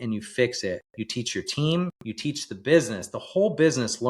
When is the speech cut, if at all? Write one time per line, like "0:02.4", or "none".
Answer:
0:00.9
0:02.0